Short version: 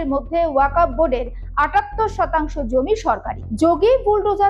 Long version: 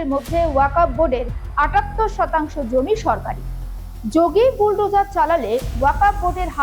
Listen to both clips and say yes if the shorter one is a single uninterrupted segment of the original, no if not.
no